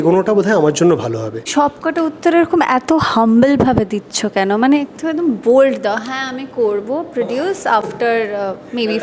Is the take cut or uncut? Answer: cut